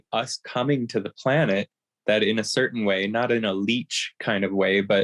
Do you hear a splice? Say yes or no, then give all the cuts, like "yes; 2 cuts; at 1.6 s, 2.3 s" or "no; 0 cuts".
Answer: no; 0 cuts